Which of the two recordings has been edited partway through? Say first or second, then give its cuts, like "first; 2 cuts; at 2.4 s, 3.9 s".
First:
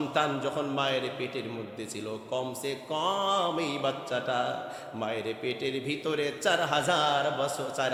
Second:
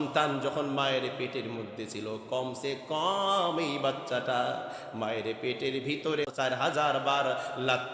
second; 1 cut; at 6.3 s